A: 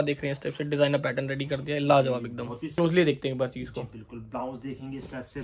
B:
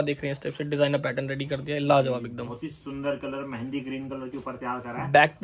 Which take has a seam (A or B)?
A